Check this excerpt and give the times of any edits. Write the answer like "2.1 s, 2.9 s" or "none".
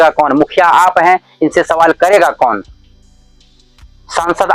none